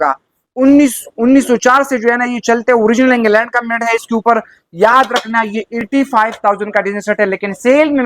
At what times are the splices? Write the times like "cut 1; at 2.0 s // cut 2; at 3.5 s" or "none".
none